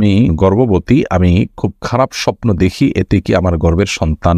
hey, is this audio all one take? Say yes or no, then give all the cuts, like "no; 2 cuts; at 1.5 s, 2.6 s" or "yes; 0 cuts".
yes; 0 cuts